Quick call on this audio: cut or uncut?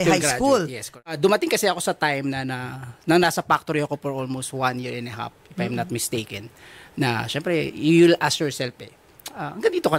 cut